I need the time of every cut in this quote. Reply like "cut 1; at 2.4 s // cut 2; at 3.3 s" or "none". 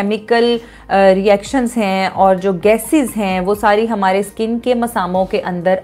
none